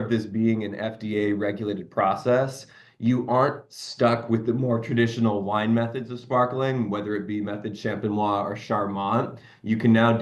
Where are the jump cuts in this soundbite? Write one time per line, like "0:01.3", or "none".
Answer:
none